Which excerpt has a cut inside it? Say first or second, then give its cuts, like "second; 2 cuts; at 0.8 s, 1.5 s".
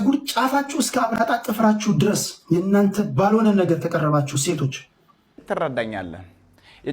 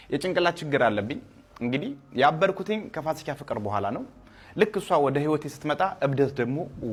first; 1 cut; at 5.4 s